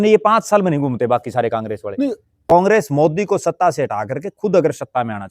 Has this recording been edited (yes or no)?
yes